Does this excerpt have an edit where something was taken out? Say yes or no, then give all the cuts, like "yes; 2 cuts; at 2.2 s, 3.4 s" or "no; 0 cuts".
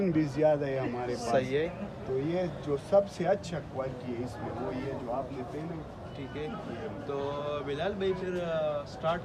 no; 0 cuts